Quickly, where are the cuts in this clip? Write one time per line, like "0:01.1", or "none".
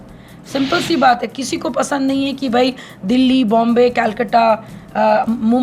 none